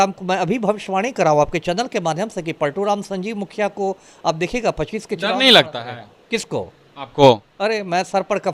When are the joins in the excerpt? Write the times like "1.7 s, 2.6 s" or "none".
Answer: none